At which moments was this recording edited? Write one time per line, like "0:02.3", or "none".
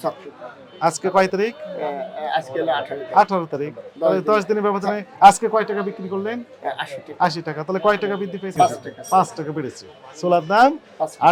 none